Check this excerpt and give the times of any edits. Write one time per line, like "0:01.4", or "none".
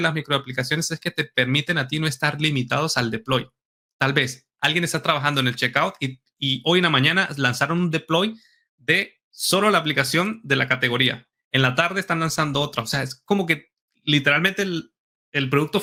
none